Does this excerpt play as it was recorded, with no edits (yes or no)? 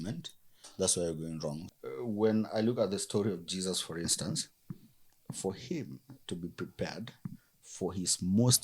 no